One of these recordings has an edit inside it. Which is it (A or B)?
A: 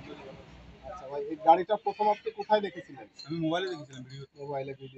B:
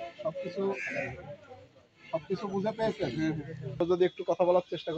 B